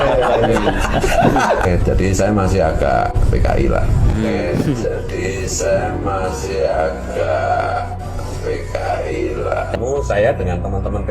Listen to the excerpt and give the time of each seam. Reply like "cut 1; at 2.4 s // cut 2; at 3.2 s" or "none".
cut 1; at 9.8 s